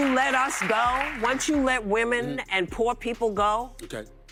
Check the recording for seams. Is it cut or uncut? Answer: uncut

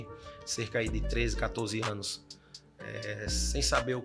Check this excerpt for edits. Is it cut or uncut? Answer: uncut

